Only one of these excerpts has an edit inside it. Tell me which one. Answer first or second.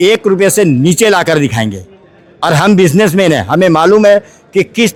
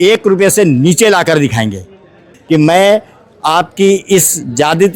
second